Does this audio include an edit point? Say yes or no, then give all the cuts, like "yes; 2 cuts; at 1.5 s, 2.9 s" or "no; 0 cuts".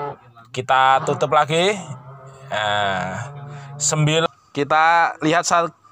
yes; 1 cut; at 4.3 s